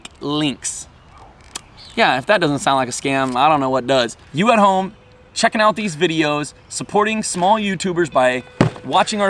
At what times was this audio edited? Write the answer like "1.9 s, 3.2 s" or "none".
4.2 s